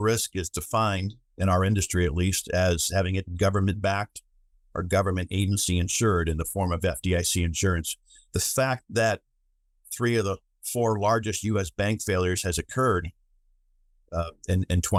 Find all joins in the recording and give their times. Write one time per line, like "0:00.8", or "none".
none

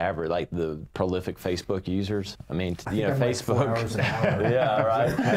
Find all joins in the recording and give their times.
none

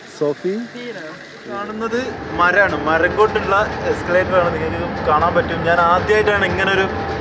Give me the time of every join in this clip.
0:01.8

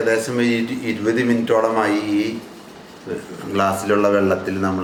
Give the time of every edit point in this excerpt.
none

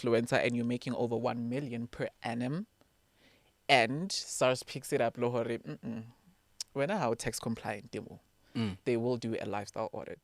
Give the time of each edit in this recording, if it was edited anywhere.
none

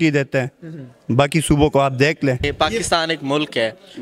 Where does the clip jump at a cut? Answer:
0:02.5

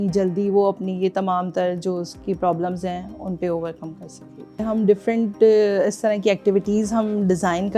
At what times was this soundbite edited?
0:04.6

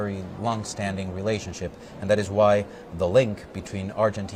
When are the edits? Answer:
none

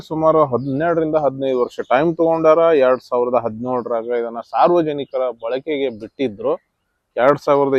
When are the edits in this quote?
none

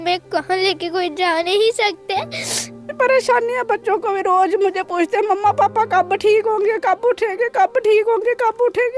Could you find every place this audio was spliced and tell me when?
0:02.8

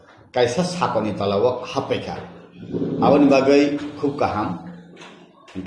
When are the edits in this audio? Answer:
0:03.1

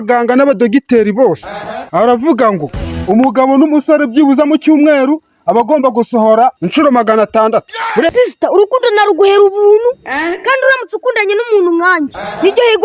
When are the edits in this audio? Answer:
0:08.1

